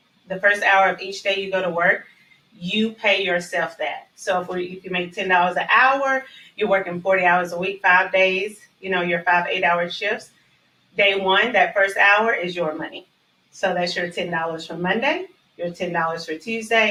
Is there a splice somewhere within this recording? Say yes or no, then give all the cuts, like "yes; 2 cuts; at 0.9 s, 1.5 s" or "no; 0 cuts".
no; 0 cuts